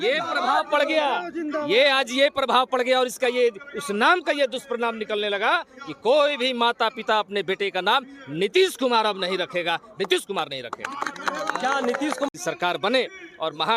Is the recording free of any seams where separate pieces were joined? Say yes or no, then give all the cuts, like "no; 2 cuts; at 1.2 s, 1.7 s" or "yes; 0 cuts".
no; 1 cut; at 12.3 s